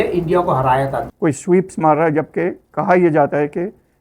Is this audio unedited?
no; 1 cut; at 1.0 s

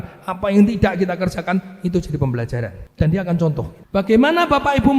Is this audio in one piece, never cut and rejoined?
no; 2 cuts; at 2.8 s, 3.8 s

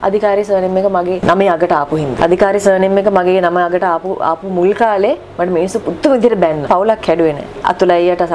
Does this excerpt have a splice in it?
yes; 4 cuts; at 1.2 s, 2.2 s, 6.7 s, 7.5 s

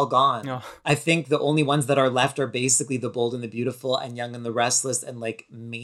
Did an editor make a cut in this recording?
no; 0 cuts

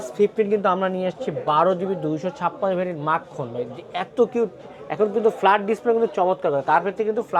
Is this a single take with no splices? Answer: yes; 0 cuts

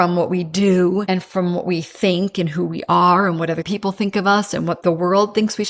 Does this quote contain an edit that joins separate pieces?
yes; 2 cuts; at 1.0 s, 4.8 s

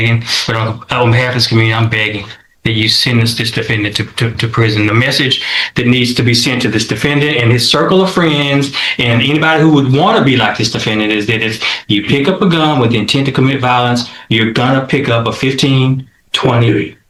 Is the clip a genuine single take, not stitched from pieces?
yes; 0 cuts

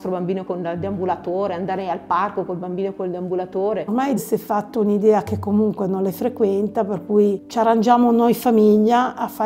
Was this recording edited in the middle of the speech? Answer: yes; 1 cut; at 3.9 s

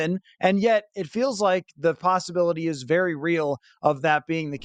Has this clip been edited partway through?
no; 0 cuts

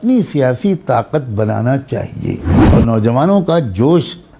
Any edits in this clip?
yes; 1 cut; at 2.5 s

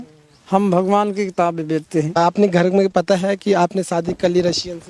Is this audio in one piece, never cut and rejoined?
no; 1 cut; at 2.1 s

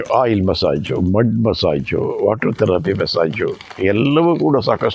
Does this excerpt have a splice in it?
no; 0 cuts

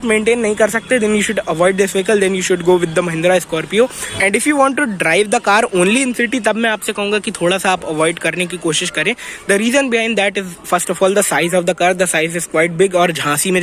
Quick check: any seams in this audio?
no; 0 cuts

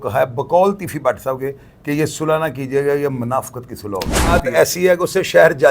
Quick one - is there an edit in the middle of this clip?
yes; 1 cut; at 4.4 s

